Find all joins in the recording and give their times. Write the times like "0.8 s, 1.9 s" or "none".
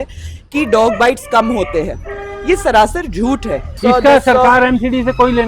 3.8 s